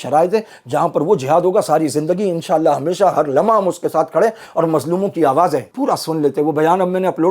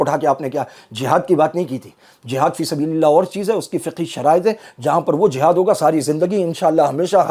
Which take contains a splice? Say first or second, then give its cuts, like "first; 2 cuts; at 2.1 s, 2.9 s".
first; 1 cut; at 5.7 s